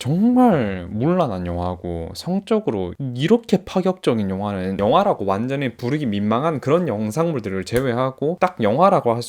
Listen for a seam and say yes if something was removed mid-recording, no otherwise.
no